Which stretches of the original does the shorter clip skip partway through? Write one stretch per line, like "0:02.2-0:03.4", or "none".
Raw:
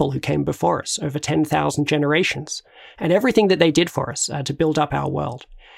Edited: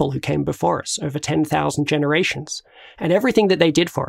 none